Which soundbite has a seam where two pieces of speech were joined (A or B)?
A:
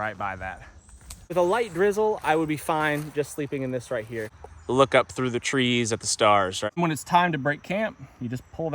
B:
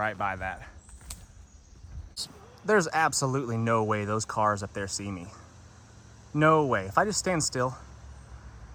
A